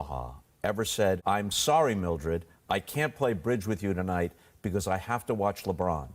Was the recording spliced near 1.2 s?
yes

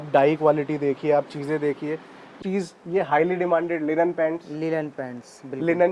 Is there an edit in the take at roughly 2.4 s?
yes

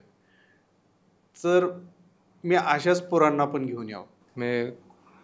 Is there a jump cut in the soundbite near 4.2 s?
yes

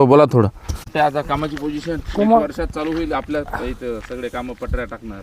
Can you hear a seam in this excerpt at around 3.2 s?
no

